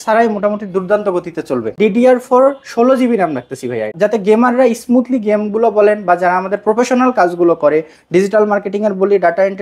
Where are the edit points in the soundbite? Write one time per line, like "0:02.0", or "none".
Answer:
0:01.7
0:03.9